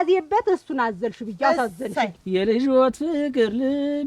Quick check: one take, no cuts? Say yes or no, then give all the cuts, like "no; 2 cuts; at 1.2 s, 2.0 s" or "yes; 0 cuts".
no; 1 cut; at 2.1 s